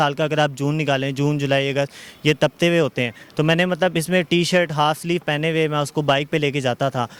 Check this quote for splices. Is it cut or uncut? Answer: uncut